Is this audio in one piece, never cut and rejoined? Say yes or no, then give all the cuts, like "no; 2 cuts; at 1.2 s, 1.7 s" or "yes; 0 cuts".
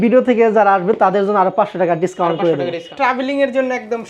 no; 1 cut; at 2.9 s